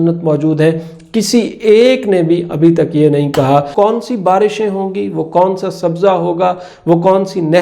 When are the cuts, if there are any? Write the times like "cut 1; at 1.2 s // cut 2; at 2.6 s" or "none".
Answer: cut 1; at 3.7 s